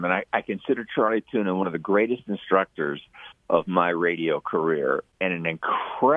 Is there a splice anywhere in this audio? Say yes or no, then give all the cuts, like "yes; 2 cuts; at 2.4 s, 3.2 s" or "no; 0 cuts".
yes; 1 cut; at 5.1 s